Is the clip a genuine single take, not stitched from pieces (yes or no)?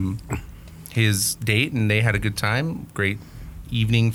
yes